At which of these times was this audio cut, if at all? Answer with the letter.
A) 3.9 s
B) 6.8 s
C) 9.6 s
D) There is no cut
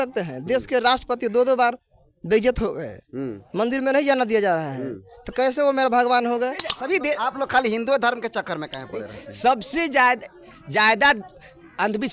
B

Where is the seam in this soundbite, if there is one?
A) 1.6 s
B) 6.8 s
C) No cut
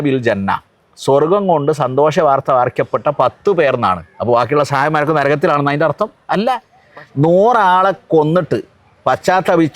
B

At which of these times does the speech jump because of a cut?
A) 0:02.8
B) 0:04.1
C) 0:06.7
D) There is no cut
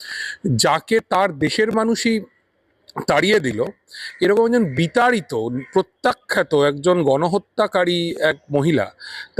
D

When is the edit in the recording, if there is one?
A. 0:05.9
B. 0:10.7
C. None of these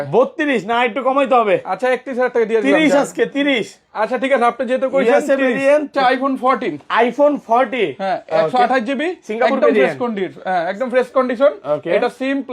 A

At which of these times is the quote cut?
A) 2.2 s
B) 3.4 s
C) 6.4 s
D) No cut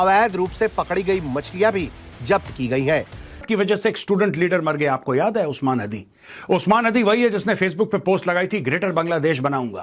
B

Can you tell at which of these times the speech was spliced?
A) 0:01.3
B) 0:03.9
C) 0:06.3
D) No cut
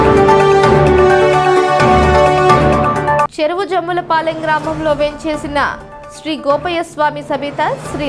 A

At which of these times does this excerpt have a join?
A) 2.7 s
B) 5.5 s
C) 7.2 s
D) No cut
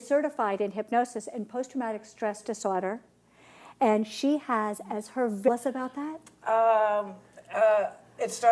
D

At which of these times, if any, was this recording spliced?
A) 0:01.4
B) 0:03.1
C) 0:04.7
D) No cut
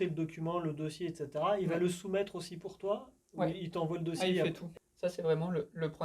C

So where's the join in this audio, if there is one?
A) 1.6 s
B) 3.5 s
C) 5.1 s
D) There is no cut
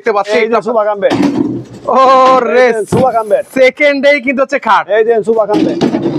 D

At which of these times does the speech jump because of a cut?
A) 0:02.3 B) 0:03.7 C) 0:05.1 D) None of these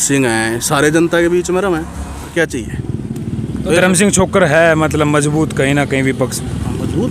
A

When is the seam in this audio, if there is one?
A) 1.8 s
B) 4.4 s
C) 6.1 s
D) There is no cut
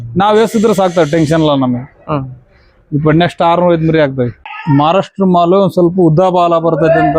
B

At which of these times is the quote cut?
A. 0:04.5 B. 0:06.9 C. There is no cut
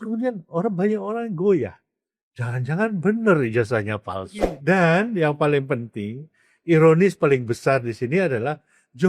A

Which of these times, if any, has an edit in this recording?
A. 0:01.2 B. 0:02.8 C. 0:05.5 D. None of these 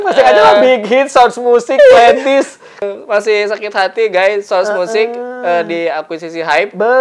B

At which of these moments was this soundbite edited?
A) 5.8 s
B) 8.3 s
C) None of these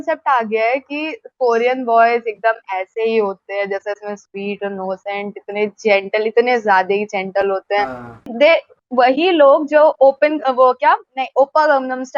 B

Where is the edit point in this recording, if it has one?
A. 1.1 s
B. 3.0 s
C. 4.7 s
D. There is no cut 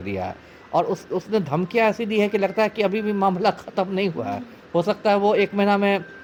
D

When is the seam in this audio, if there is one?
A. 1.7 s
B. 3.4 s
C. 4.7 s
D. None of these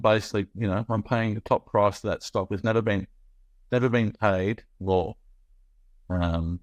D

